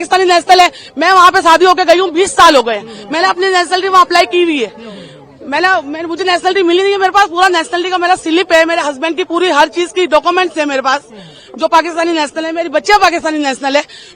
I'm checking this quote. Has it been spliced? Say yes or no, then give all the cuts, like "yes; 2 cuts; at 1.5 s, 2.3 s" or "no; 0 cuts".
no; 0 cuts